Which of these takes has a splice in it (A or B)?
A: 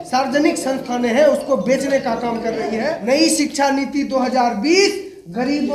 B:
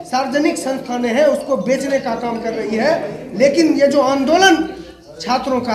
A